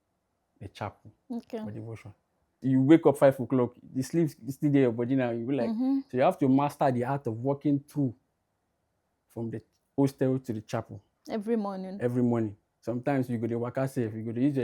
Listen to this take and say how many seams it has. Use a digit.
1